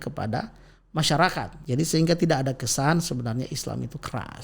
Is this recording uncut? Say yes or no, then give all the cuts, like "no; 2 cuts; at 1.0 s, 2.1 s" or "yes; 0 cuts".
no; 1 cut; at 1.5 s